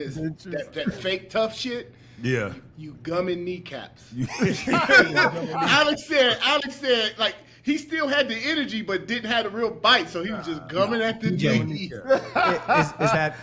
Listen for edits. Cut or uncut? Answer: uncut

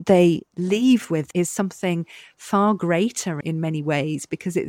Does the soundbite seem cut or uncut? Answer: cut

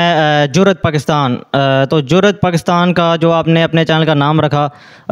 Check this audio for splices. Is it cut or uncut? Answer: uncut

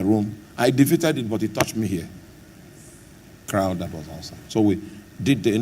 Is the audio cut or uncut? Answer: cut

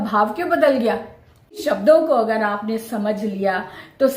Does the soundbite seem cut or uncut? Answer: cut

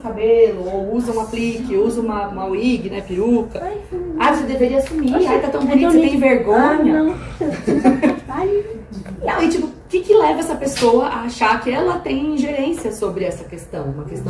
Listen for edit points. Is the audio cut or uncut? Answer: uncut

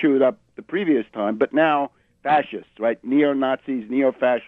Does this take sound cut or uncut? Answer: cut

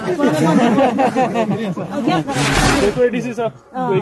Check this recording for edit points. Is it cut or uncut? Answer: cut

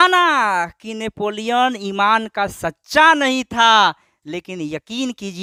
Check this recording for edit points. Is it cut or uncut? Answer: uncut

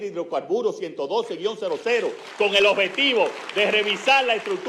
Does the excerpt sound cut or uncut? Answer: uncut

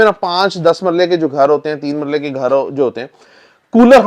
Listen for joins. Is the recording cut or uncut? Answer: uncut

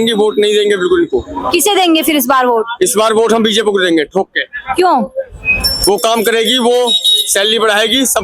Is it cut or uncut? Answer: uncut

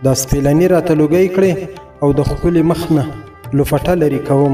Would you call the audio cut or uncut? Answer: uncut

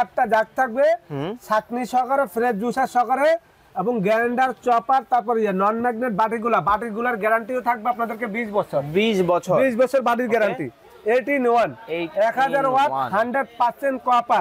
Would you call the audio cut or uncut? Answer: uncut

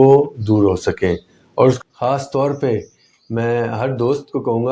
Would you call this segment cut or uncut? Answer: cut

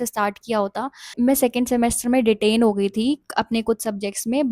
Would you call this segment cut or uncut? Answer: cut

